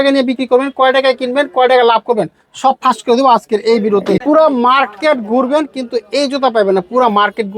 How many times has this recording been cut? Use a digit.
1